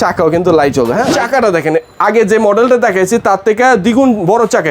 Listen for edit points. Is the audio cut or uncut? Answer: cut